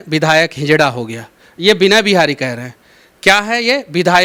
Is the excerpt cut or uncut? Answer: uncut